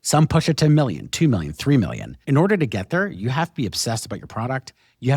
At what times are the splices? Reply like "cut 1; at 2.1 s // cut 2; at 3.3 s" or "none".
cut 1; at 2.2 s

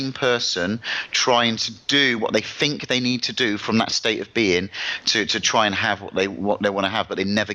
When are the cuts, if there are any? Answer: cut 1; at 1.1 s

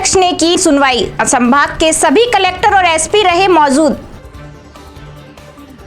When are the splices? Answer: cut 1; at 4.1 s

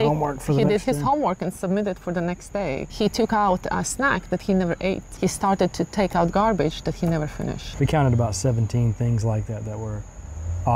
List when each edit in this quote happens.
cut 1; at 2.9 s // cut 2; at 5.1 s // cut 3; at 7.6 s

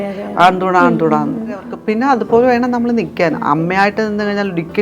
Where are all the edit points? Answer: cut 1; at 1.7 s

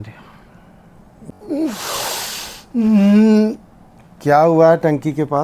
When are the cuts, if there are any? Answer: cut 1; at 1.3 s

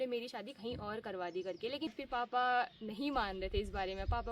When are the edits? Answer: cut 1; at 1.9 s

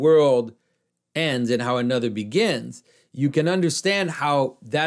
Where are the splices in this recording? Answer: none

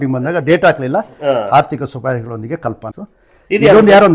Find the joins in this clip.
cut 1; at 2.9 s

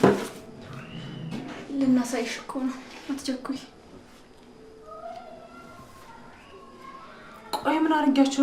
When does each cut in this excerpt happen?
none

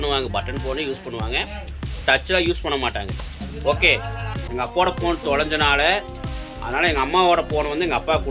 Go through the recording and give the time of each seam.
cut 1; at 4.4 s

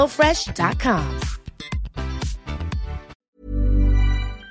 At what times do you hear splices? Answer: cut 1; at 3.1 s

